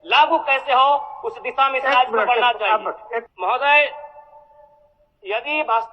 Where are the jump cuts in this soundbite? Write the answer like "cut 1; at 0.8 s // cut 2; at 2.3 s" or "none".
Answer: cut 1; at 3.3 s